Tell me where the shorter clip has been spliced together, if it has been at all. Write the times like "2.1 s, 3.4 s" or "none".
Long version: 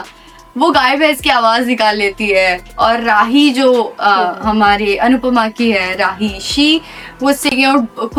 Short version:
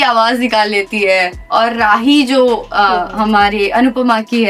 none